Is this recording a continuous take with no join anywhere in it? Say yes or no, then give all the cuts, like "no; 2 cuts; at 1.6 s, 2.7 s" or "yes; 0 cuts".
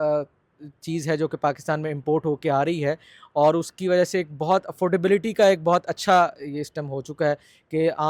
yes; 0 cuts